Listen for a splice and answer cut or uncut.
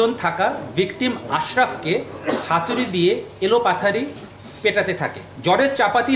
cut